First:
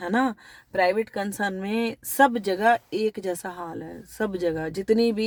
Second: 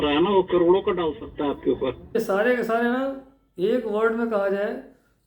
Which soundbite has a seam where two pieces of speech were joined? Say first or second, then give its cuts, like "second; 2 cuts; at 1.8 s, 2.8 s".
second; 1 cut; at 2.1 s